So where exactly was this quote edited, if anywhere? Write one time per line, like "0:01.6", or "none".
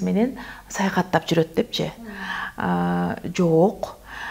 none